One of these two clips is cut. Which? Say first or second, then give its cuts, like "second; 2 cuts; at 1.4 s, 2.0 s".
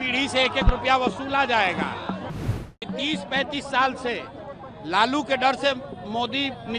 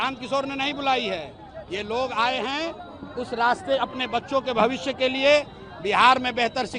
first; 1 cut; at 2.4 s